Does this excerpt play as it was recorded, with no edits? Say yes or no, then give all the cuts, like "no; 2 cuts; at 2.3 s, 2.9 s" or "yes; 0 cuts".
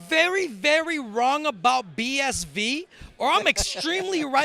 yes; 0 cuts